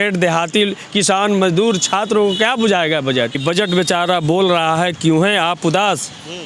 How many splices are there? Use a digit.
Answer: 1